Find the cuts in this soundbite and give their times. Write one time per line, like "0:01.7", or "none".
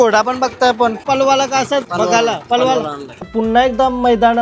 0:03.1